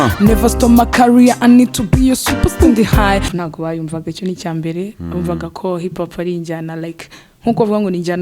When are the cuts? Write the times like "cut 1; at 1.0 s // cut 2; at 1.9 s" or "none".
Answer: cut 1; at 3.3 s